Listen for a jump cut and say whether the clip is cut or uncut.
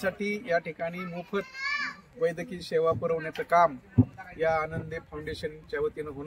uncut